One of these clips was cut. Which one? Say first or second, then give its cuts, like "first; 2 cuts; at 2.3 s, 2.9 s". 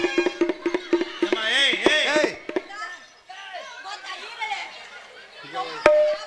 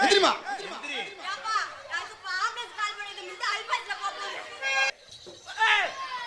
second; 1 cut; at 4.9 s